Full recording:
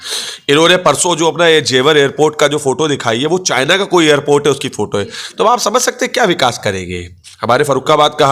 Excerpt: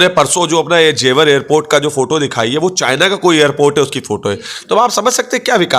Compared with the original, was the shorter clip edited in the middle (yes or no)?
no